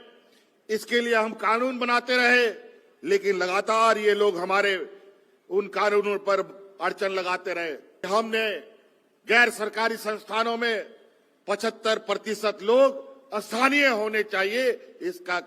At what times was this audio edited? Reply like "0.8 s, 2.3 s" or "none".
8.1 s

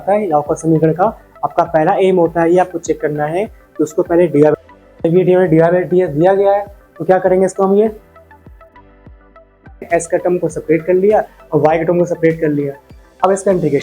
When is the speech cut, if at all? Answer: 4.6 s, 9.9 s

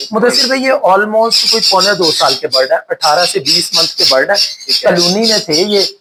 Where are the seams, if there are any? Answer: none

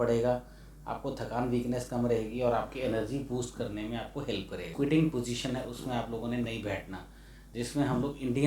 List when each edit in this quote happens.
4.7 s

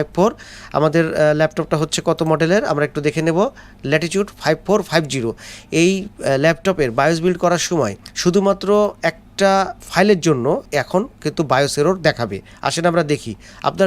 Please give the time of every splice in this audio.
8.0 s, 9.8 s, 10.6 s

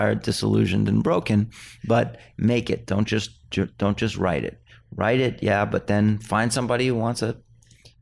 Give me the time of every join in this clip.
2.3 s

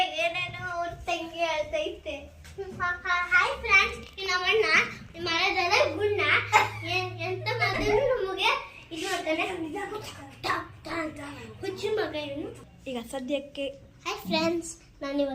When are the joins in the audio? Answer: 12.7 s

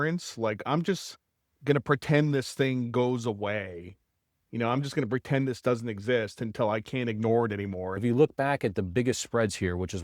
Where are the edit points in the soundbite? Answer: 8.0 s

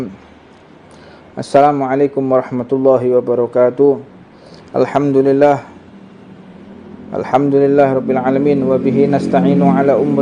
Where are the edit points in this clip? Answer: none

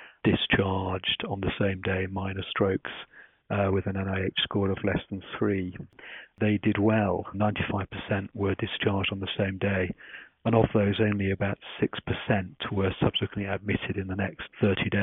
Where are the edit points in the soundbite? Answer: 6.3 s, 7.4 s

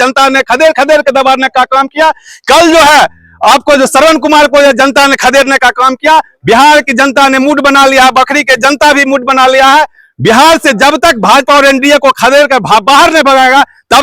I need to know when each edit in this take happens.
none

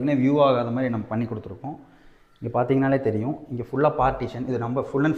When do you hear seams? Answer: none

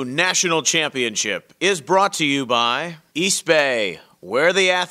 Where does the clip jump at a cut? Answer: 2.9 s

